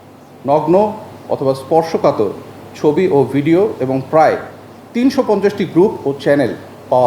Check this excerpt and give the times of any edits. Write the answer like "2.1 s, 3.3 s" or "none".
none

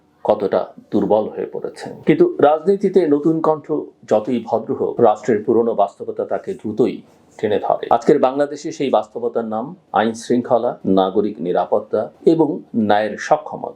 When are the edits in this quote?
1.8 s

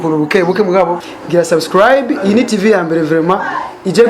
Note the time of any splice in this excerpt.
1.0 s

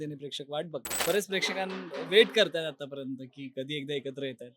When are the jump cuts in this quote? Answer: 0.9 s

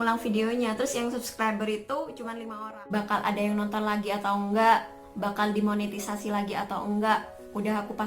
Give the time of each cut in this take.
2.4 s

